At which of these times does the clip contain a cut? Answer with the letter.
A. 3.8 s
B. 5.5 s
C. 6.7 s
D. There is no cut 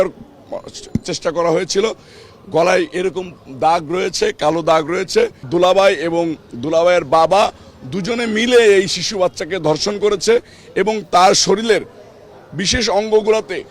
B